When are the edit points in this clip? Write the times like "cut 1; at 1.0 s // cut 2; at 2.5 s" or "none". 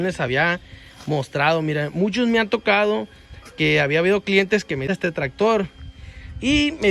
cut 1; at 4.9 s